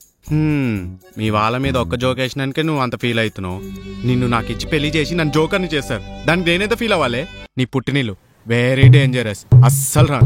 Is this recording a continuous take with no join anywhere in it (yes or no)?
no